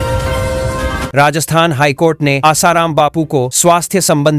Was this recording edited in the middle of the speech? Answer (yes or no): yes